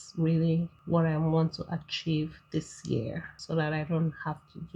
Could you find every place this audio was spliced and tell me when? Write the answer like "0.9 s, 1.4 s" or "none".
3.3 s